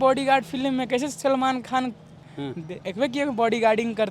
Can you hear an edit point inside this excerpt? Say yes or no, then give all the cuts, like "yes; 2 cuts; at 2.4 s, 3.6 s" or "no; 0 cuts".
no; 0 cuts